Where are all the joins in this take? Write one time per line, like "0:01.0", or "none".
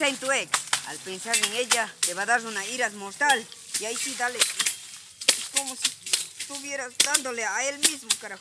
0:02.0